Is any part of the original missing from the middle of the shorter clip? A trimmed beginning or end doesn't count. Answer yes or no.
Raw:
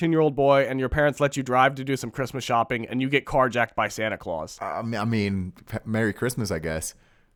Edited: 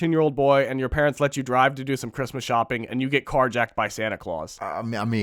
no